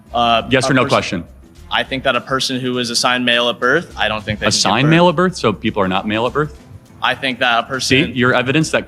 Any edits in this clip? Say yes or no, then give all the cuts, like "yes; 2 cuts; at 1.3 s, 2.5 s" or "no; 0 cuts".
no; 0 cuts